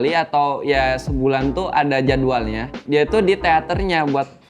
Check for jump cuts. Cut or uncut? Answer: cut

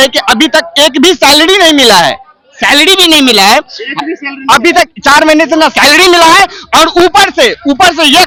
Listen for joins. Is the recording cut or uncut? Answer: uncut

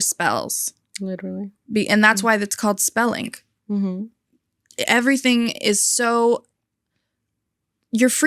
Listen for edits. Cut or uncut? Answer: uncut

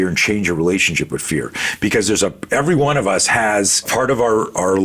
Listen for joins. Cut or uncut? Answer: cut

